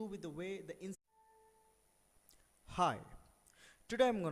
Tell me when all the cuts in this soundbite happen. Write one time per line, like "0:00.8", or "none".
none